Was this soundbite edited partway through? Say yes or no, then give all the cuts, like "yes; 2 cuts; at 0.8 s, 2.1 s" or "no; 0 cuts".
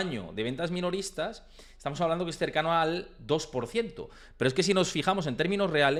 no; 0 cuts